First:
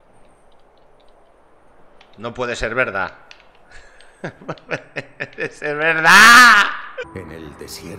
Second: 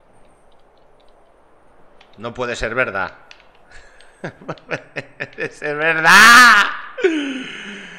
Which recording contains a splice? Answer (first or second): first